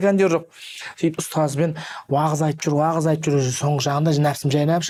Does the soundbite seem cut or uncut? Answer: uncut